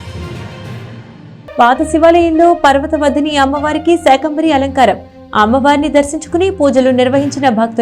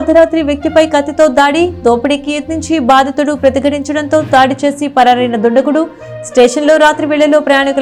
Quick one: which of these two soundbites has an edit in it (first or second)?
first